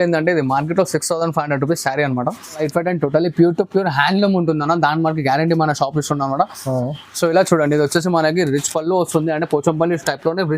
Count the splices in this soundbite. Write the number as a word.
one